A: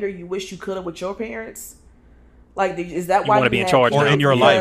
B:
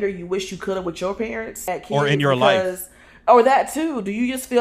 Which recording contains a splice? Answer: B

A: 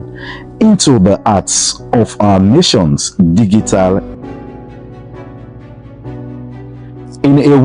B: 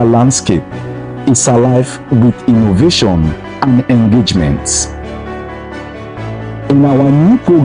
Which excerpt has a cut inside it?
A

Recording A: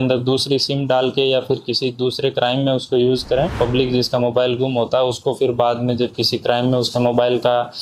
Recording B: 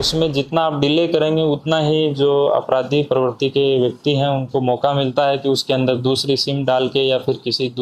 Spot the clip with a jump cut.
A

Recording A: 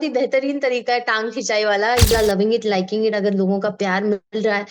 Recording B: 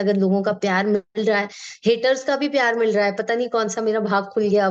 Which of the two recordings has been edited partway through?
A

